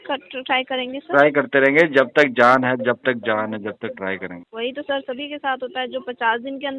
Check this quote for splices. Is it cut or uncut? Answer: cut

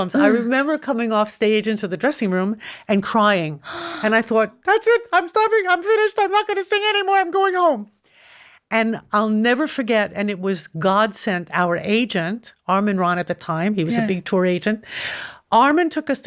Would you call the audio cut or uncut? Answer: uncut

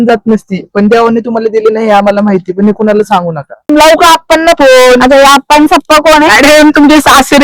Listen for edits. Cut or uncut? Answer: cut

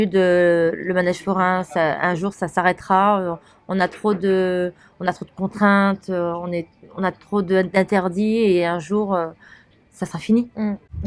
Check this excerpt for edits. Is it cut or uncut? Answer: uncut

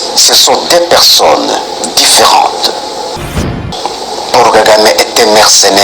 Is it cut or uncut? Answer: cut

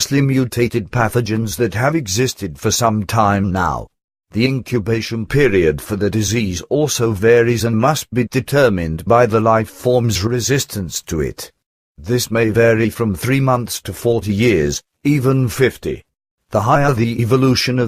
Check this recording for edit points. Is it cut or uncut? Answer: cut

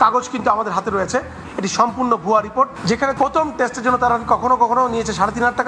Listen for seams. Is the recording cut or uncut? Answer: cut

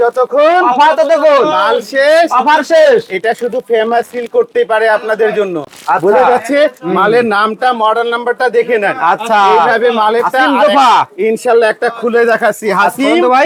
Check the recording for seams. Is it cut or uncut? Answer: uncut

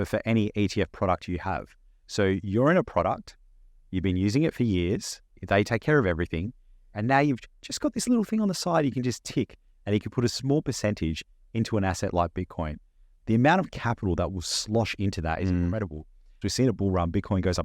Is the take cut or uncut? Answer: cut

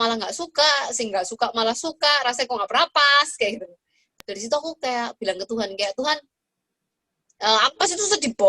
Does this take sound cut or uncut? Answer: cut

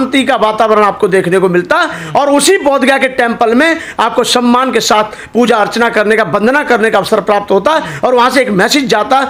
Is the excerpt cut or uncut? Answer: uncut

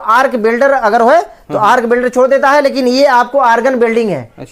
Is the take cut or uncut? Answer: uncut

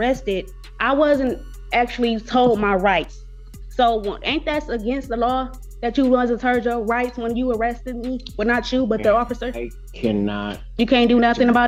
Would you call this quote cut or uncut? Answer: uncut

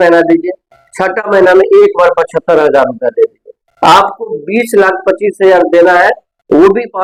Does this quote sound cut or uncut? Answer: uncut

